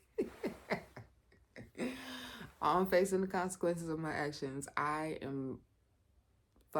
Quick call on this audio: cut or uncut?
uncut